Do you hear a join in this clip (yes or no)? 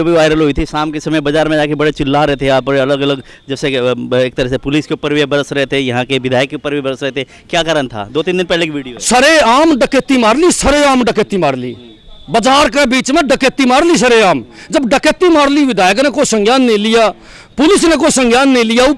no